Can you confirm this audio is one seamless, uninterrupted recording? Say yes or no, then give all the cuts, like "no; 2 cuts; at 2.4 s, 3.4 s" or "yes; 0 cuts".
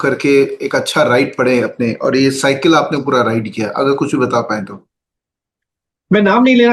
yes; 0 cuts